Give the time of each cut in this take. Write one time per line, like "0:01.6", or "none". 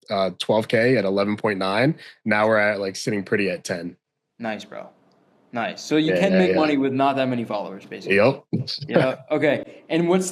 none